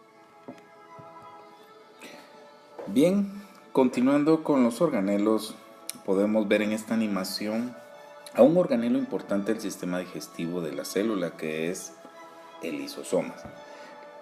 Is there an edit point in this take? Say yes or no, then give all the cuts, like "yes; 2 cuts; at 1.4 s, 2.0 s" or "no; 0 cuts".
no; 0 cuts